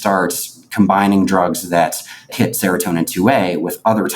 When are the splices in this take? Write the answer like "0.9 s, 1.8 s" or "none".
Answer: 2.3 s